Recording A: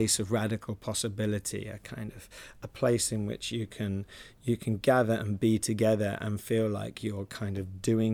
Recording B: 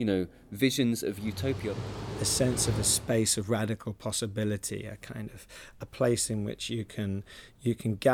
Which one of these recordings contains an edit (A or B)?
B